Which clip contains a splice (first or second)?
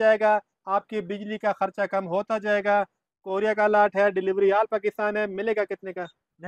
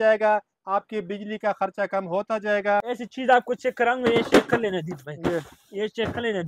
second